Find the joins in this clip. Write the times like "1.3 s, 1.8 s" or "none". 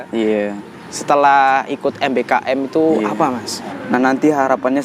3.7 s